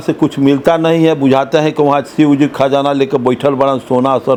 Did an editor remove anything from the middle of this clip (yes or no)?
no